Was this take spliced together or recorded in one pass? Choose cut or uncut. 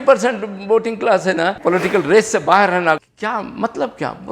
cut